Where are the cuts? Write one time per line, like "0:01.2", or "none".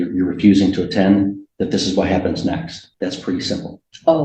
0:02.8